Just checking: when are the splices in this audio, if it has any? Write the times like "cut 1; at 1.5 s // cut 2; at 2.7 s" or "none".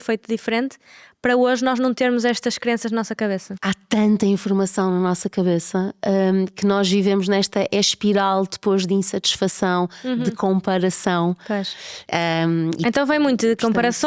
cut 1; at 3.5 s